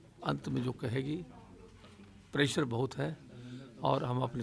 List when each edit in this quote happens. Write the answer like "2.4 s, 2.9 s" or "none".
none